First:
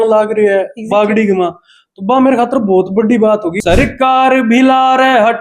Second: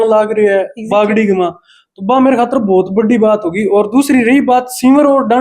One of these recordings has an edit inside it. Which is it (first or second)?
first